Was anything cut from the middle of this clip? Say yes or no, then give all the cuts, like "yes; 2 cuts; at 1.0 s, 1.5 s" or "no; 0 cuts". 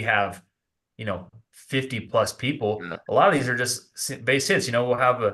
no; 0 cuts